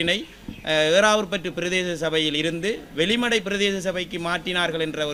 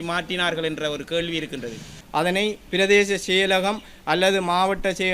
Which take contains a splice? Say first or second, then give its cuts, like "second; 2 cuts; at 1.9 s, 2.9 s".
second; 1 cut; at 2.0 s